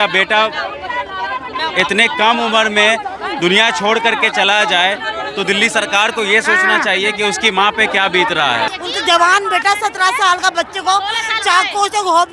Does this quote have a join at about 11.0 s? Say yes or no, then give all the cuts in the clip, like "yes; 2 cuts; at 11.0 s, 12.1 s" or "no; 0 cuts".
no; 1 cut; at 8.7 s